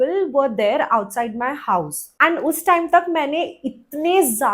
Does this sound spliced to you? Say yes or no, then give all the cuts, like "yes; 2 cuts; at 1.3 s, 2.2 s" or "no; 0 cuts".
no; 0 cuts